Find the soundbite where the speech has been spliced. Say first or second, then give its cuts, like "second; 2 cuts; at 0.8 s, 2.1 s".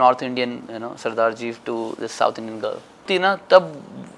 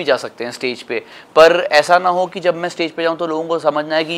first; 1 cut; at 3.1 s